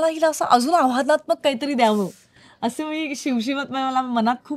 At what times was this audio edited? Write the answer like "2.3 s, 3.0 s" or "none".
none

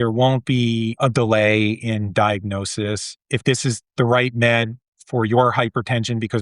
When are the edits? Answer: 1.0 s, 3.2 s

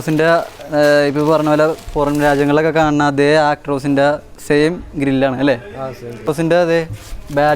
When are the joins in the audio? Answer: 6.3 s

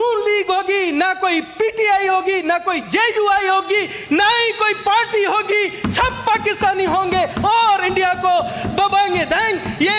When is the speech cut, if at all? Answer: none

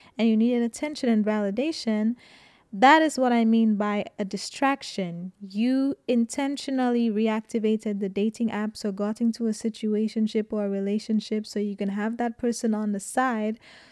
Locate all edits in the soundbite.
none

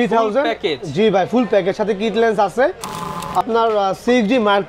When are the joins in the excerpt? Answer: 3.4 s

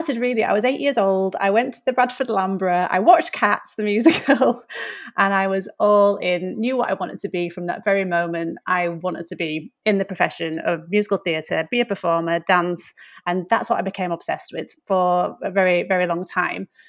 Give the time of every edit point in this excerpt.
none

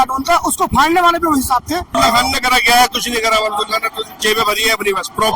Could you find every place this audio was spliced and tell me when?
1.9 s

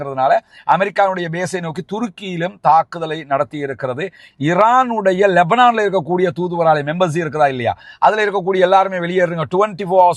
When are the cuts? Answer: 4.2 s

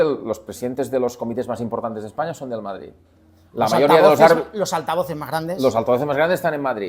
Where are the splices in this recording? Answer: none

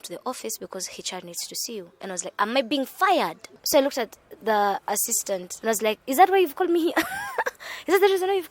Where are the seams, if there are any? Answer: 3.5 s, 5.5 s

